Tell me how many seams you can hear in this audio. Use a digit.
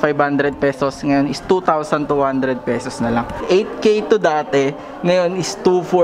0